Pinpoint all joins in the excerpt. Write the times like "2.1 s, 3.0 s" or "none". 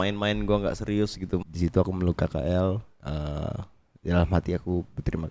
1.4 s